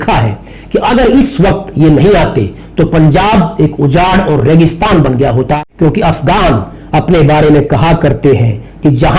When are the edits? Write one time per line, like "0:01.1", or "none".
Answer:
0:05.7

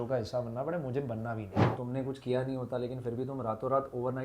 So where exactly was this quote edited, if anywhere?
0:01.8

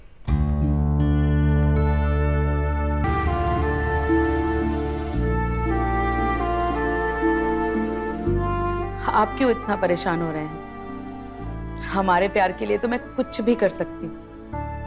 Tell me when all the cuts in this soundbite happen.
0:03.0

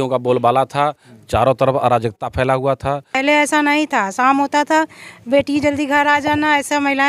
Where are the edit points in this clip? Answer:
0:03.2

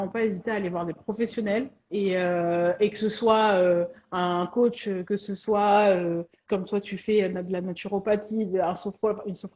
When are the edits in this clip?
none

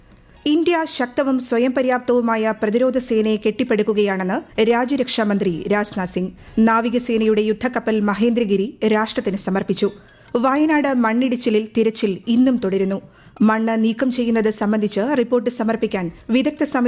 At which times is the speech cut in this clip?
0:10.1

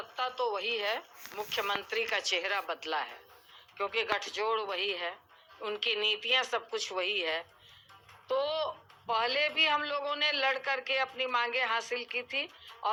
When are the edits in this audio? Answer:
none

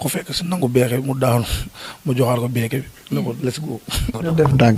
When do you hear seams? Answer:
none

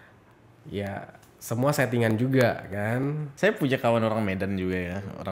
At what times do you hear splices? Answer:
0:03.3

